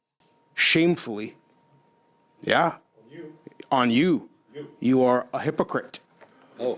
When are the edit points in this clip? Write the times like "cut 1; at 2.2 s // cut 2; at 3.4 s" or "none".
none